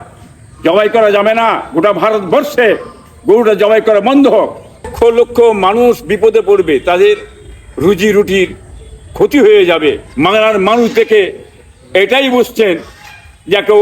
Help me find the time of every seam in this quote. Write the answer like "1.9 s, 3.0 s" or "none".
4.9 s, 10.1 s